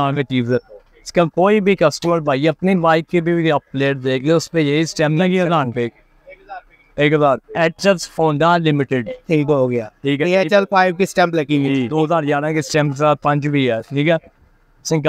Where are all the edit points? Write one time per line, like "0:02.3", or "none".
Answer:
0:01.1
0:07.5
0:11.9